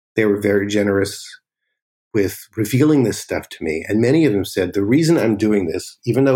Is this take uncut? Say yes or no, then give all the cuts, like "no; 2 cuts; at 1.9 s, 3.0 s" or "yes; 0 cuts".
no; 1 cut; at 1.9 s